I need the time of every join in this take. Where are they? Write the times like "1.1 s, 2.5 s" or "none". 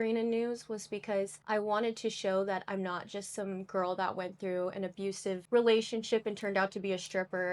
1.4 s, 5.4 s